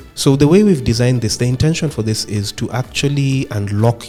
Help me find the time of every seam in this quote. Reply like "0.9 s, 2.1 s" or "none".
none